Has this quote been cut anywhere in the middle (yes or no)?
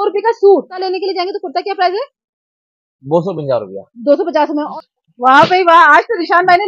yes